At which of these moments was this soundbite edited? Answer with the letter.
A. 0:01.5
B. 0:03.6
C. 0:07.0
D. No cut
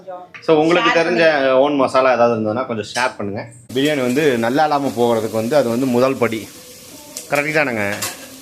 B